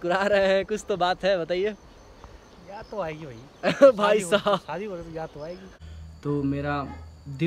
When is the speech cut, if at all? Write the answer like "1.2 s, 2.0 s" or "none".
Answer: 5.7 s